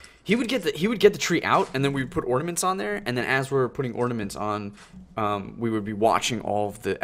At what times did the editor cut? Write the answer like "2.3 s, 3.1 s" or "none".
none